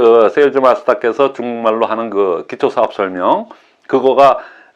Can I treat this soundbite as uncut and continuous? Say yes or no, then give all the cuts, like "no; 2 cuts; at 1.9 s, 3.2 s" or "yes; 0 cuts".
yes; 0 cuts